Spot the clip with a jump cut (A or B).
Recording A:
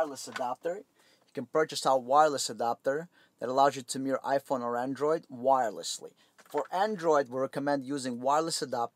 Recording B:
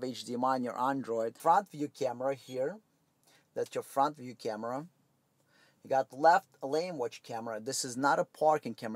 B